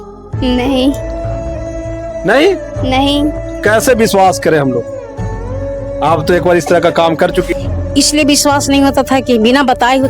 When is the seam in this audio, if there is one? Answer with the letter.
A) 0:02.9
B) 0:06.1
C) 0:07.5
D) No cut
C